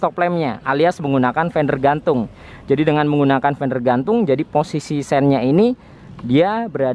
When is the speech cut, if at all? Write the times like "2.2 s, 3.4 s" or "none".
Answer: none

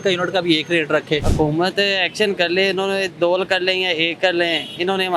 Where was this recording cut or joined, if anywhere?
1.3 s

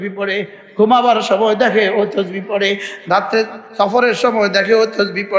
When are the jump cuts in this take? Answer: none

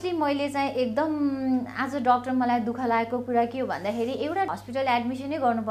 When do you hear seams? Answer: 4.5 s

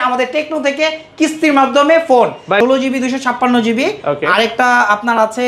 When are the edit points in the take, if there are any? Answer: 2.6 s

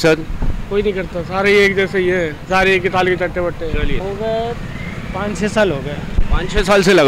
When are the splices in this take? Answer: 4.0 s

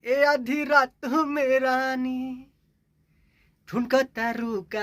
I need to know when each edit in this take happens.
none

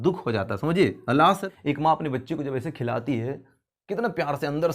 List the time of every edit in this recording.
1.6 s

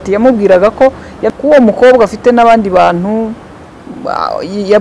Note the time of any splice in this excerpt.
1.1 s

